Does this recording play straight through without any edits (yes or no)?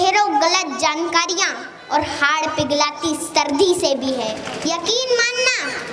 no